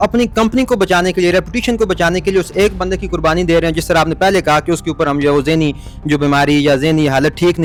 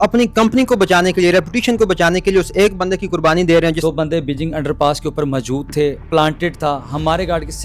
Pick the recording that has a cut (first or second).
second